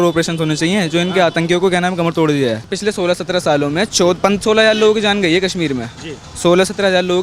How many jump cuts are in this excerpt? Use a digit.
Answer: 1